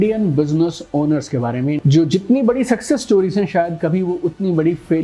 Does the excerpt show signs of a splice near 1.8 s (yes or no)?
yes